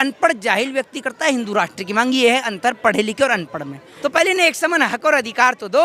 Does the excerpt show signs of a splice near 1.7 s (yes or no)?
no